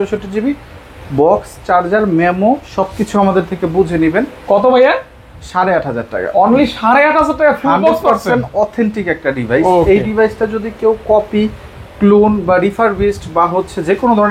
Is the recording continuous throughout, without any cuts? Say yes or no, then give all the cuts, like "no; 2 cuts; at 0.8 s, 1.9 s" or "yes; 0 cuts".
yes; 0 cuts